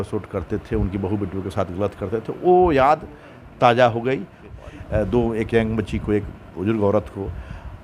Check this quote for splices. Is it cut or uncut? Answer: cut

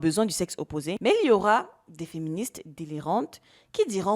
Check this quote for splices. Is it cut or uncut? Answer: cut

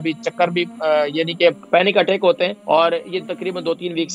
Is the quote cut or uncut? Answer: cut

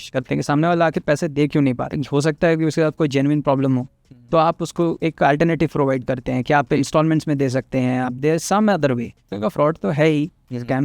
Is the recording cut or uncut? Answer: cut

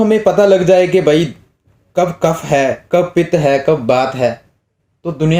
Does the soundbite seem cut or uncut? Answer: uncut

